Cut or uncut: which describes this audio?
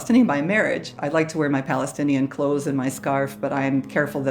cut